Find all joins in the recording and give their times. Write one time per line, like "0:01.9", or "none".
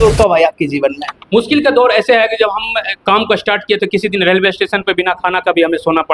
none